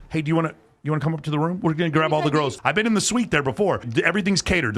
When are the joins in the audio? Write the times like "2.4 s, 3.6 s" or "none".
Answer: 2.6 s, 3.9 s